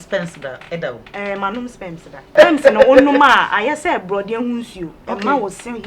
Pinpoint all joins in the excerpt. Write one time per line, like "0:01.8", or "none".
0:02.3